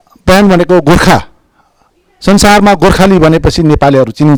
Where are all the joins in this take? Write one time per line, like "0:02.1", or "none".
none